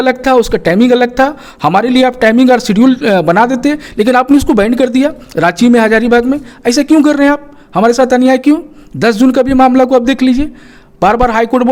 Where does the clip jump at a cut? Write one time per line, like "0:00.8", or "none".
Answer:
none